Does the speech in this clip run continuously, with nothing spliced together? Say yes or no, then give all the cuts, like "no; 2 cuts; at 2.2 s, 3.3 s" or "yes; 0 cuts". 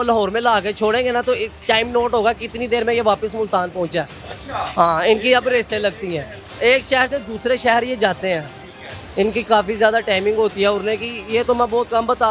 yes; 0 cuts